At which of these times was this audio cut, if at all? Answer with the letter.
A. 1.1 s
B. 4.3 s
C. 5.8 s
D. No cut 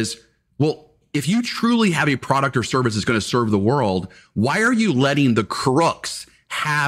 A